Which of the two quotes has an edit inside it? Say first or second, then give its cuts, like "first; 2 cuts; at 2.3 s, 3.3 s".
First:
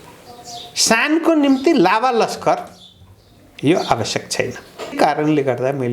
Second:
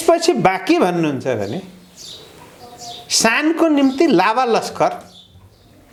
first; 1 cut; at 5.0 s